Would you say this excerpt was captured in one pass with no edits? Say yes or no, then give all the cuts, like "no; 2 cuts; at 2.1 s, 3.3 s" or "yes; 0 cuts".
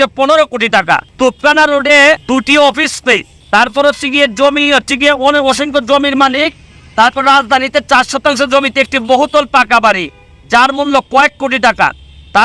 no; 3 cuts; at 1.1 s, 2.2 s, 3.3 s